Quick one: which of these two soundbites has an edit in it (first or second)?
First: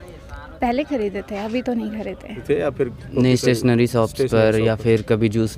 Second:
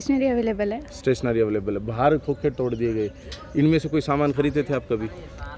first